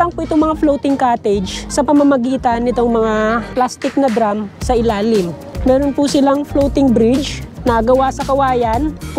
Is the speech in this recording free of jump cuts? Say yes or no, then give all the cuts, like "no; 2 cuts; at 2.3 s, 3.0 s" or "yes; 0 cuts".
no; 1 cut; at 1.6 s